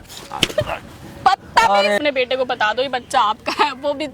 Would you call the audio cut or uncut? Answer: cut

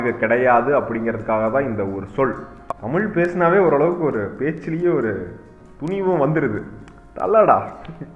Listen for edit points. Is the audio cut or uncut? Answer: cut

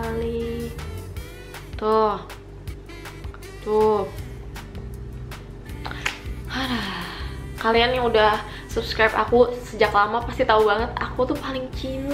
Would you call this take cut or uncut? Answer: uncut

